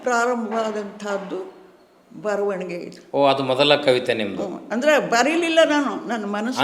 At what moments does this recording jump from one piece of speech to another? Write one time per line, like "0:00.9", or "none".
none

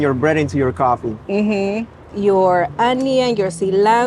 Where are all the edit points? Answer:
0:02.1

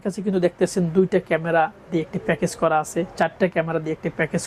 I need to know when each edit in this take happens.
none

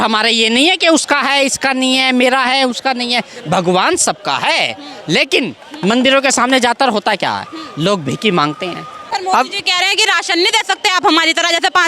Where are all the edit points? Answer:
0:09.0

